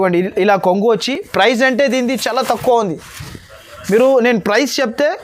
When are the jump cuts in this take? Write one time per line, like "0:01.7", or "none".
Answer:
none